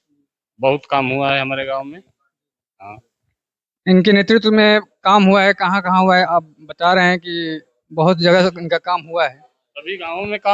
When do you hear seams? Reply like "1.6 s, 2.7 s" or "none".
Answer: none